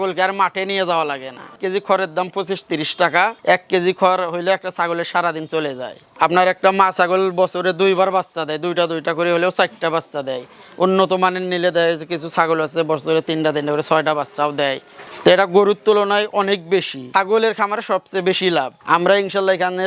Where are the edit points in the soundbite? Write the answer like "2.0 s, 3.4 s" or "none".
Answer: 1.6 s, 6.1 s, 17.0 s